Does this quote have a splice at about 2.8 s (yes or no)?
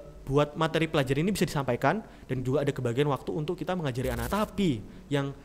no